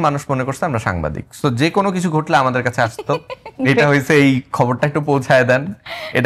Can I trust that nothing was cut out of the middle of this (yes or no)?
yes